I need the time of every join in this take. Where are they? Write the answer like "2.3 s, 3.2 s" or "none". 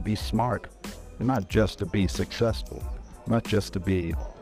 none